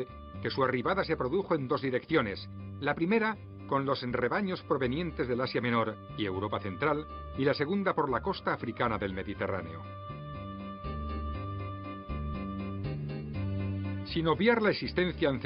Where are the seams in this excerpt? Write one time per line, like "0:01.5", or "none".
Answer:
none